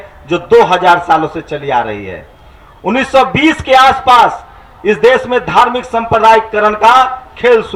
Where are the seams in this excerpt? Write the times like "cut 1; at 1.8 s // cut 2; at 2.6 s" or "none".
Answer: none

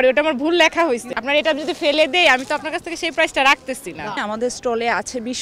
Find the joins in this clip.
cut 1; at 1.1 s // cut 2; at 4.2 s

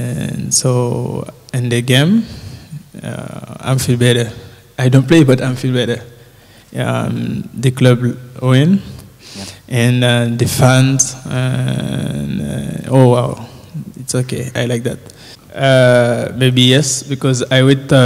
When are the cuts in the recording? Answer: cut 1; at 16.4 s

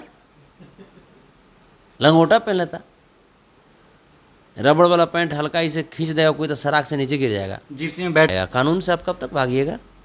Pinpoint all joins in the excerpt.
cut 1; at 8.3 s

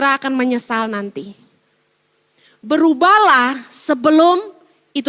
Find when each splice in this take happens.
none

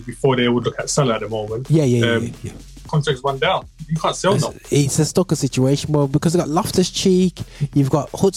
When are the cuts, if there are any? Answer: cut 1; at 2.9 s

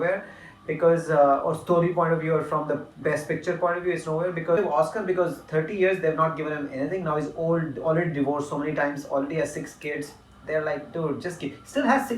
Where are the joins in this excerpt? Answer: cut 1; at 4.6 s

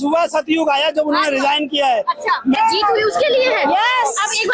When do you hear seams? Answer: cut 1; at 2.6 s

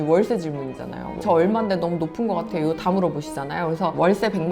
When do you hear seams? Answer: cut 1; at 1.1 s

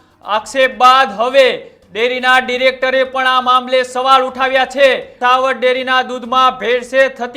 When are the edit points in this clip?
cut 1; at 5.2 s

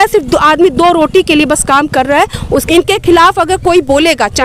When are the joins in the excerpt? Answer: cut 1; at 2.7 s

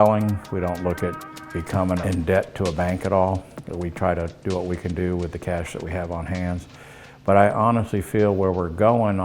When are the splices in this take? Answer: cut 1; at 2.0 s

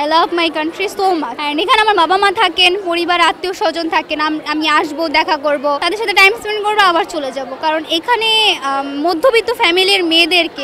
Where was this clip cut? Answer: cut 1; at 1.4 s // cut 2; at 5.8 s

